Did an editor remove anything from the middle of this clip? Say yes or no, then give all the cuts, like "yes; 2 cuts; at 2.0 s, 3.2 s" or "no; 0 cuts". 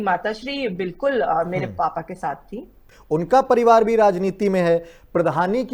yes; 1 cut; at 2.9 s